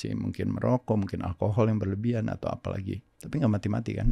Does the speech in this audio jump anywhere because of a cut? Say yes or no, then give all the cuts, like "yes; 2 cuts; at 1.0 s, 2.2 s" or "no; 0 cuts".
yes; 1 cut; at 3.1 s